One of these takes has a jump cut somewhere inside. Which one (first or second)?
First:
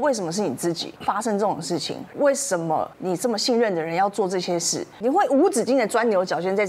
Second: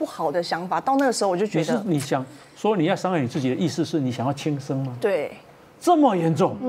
first